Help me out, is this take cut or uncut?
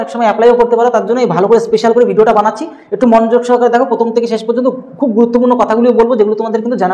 uncut